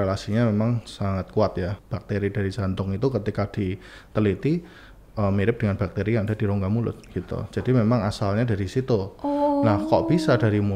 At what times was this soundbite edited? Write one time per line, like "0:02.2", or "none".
0:01.7